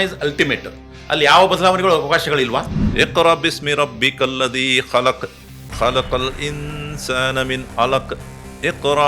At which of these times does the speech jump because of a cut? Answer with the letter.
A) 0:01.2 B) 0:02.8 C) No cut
B